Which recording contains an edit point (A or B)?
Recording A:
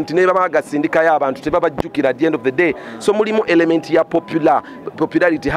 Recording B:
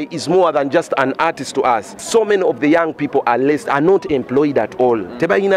B